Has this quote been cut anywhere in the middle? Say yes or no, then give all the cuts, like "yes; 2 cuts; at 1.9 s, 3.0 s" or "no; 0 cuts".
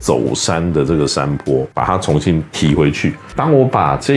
yes; 2 cuts; at 1.7 s, 3.2 s